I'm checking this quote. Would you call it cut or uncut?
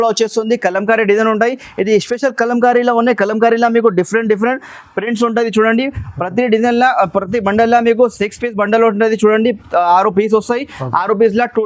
uncut